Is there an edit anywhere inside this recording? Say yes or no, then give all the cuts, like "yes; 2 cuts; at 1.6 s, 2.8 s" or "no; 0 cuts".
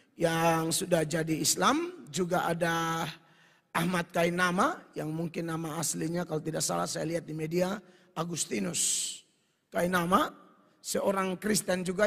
no; 0 cuts